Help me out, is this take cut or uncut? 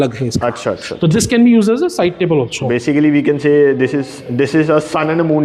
uncut